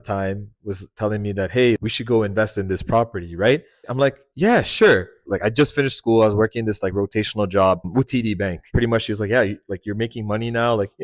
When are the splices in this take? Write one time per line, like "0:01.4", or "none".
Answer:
0:01.8
0:03.8
0:05.2